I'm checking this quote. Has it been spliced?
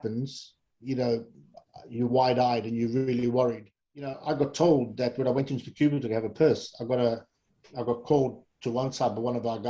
yes; 1 cut; at 4.2 s

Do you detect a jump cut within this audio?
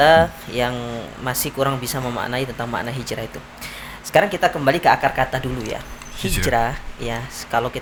no; 0 cuts

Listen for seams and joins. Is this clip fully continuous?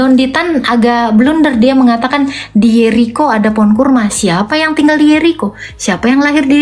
yes; 0 cuts

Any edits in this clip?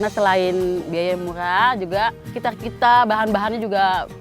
yes; 1 cut; at 2.3 s

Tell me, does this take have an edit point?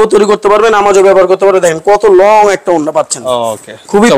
no; 0 cuts

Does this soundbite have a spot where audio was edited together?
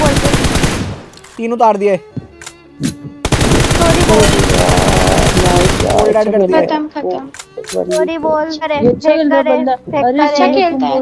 yes; 1 cut; at 8.6 s

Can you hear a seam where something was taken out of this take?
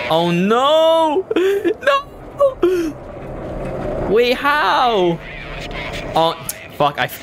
no; 0 cuts

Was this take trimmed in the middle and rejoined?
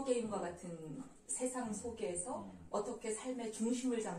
no; 0 cuts

